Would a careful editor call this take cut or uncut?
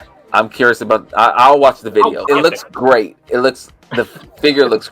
cut